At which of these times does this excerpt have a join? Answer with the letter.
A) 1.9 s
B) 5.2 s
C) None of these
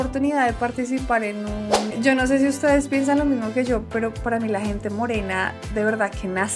A